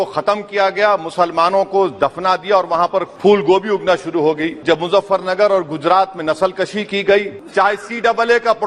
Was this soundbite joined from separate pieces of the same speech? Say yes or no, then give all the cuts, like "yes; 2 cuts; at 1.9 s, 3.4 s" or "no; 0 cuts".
yes; 3 cuts; at 3.1 s, 4.6 s, 7.4 s